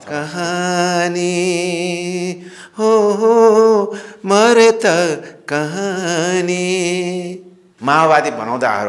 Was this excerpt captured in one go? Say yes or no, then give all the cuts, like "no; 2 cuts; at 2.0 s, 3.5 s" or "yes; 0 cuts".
no; 1 cut; at 7.6 s